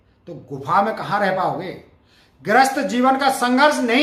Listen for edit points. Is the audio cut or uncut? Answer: uncut